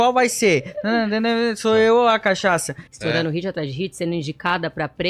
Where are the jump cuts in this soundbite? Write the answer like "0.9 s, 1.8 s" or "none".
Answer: 2.9 s